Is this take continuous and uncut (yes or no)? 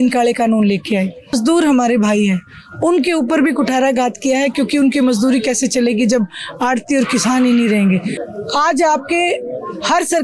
no